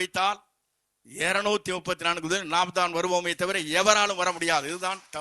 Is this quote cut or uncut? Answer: uncut